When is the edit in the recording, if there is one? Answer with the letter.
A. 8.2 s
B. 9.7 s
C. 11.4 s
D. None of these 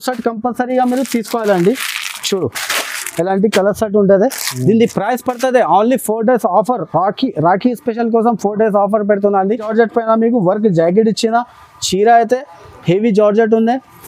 B